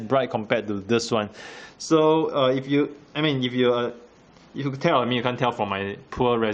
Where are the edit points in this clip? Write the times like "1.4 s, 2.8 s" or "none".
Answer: 4.2 s